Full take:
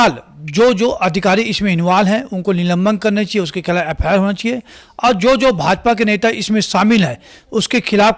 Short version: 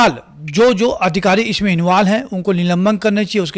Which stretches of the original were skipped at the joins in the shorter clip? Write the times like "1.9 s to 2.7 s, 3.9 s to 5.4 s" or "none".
none